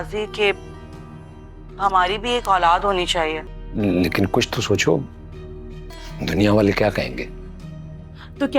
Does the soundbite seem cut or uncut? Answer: cut